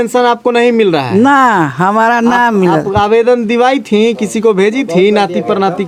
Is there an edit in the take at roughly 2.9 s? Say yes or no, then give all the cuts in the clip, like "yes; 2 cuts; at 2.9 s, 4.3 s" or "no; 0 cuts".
no; 0 cuts